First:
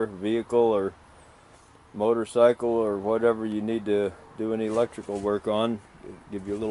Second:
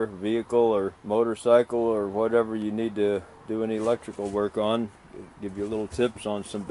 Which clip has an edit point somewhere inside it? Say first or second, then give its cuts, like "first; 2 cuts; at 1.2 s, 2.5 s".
second; 1 cut; at 1.0 s